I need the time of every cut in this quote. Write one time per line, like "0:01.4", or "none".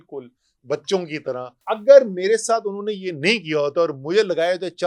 0:01.5